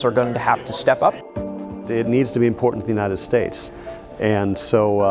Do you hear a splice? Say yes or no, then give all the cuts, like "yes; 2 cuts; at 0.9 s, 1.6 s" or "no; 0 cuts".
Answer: yes; 1 cut; at 1.6 s